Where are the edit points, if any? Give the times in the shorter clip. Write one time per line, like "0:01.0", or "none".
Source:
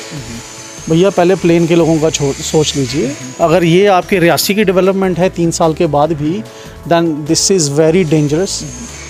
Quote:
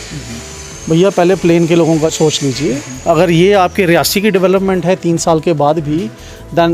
0:02.1